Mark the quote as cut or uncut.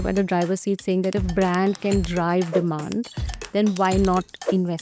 uncut